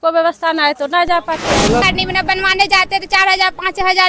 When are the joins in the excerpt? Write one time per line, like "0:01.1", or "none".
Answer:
0:01.8